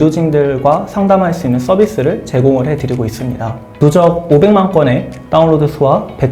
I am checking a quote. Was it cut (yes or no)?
yes